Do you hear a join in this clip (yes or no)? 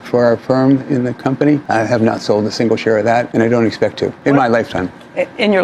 yes